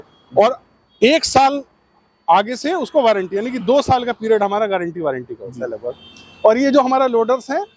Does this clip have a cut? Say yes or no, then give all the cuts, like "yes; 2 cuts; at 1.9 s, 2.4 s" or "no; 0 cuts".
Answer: no; 0 cuts